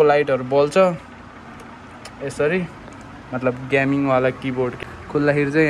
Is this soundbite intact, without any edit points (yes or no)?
yes